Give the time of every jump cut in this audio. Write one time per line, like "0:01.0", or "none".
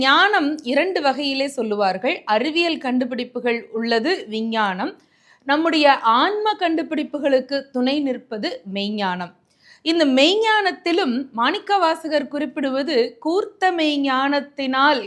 none